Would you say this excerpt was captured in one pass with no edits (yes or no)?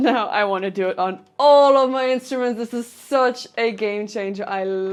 yes